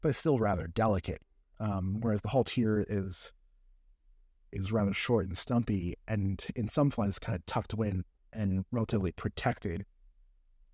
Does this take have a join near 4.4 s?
no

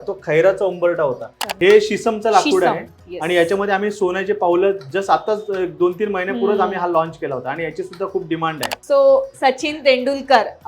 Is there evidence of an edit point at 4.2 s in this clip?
no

